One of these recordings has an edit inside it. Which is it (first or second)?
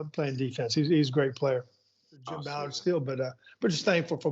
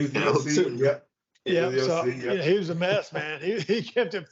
first